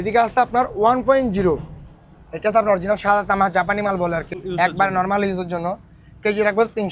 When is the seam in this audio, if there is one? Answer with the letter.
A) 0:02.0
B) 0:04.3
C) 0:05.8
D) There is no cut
B